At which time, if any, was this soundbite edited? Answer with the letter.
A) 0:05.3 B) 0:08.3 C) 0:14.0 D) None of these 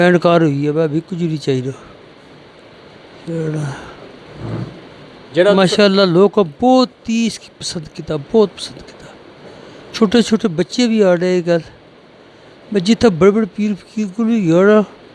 D